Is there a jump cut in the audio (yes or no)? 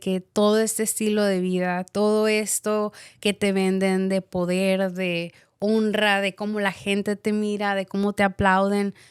no